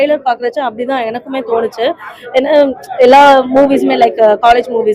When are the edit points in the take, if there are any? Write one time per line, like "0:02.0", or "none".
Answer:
none